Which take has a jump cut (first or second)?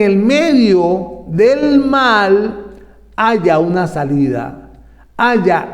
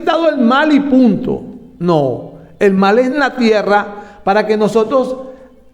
second